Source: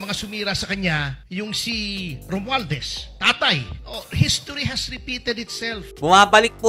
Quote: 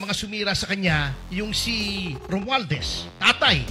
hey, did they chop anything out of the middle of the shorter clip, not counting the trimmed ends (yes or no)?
no